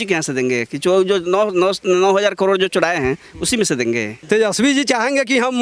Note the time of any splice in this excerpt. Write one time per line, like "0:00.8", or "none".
0:04.1